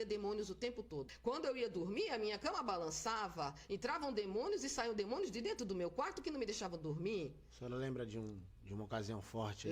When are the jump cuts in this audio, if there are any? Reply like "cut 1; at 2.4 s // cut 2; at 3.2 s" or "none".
cut 1; at 1.0 s